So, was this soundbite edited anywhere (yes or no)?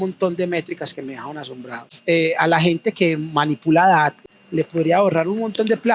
yes